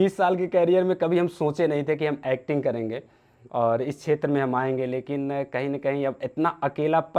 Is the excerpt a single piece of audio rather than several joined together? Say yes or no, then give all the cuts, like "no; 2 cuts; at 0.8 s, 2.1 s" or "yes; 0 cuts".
yes; 0 cuts